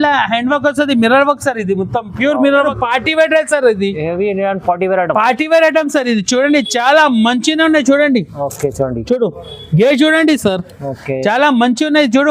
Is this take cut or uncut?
cut